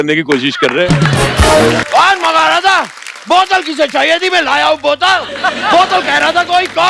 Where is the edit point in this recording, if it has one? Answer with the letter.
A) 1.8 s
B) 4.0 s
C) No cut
A